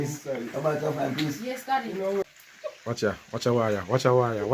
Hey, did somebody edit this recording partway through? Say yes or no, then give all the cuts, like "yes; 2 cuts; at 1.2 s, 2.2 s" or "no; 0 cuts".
yes; 1 cut; at 2.2 s